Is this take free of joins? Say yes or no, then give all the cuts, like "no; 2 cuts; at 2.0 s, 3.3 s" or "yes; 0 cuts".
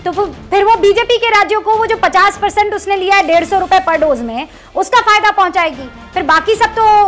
yes; 0 cuts